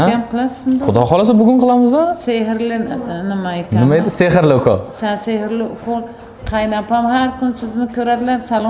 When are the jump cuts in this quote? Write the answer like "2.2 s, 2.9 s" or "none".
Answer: none